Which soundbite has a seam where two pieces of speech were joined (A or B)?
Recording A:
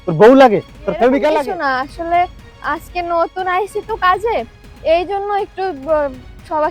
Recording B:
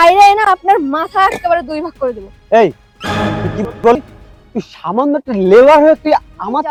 A